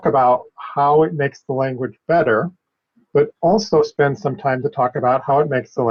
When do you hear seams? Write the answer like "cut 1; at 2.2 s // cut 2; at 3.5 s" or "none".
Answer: none